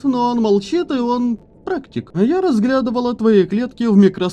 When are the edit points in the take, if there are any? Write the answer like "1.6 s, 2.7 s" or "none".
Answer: 2.0 s